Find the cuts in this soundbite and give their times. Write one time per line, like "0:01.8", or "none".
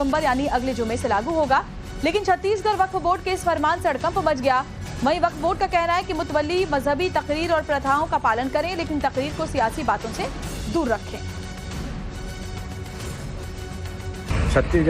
0:09.0